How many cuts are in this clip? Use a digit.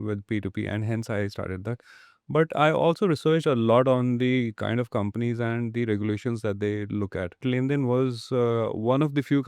1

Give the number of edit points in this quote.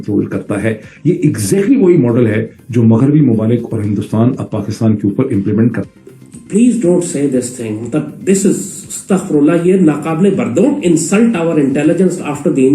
1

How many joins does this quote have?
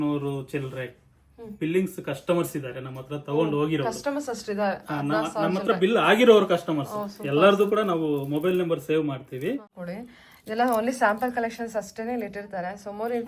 1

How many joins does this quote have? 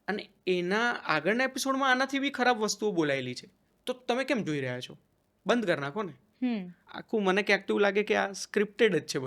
2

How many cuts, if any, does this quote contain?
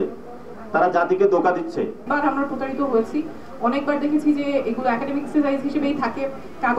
1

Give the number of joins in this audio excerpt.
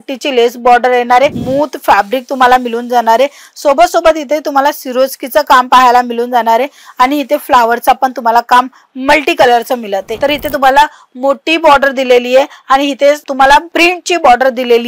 2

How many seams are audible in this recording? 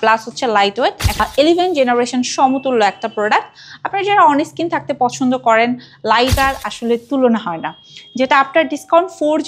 2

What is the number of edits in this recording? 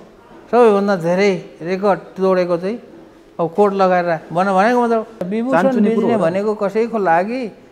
1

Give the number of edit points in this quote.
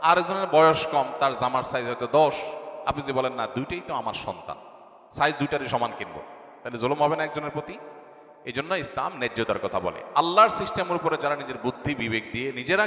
0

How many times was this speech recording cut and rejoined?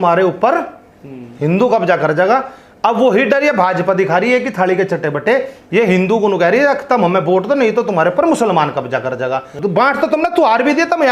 1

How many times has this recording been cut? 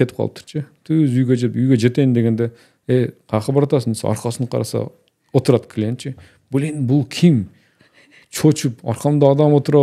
0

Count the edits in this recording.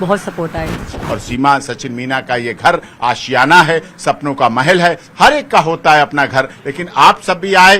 1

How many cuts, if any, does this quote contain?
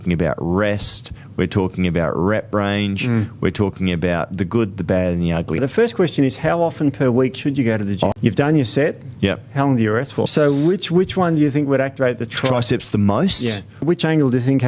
4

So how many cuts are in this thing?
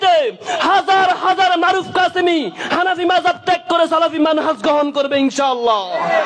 0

